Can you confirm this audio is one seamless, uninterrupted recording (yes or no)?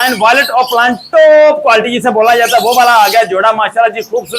yes